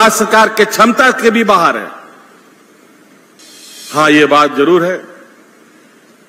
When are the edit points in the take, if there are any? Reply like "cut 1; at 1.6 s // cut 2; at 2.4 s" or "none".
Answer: cut 1; at 3.4 s